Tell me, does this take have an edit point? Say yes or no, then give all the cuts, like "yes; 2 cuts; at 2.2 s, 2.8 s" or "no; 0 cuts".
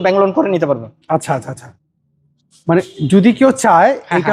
no; 0 cuts